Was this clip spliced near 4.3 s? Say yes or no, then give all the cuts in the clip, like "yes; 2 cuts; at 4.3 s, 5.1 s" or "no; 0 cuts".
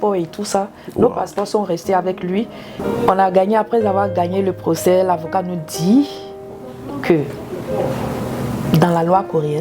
no; 1 cut; at 2.8 s